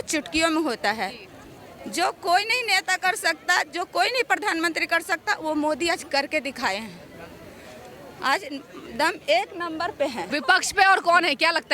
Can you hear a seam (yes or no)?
no